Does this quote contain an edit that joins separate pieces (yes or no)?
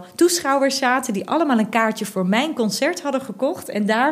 no